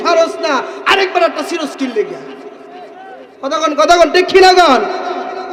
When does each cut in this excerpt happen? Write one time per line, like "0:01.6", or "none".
none